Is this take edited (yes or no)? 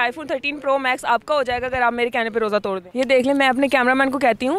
yes